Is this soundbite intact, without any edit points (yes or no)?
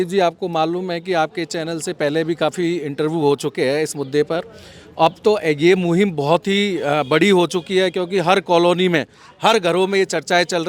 yes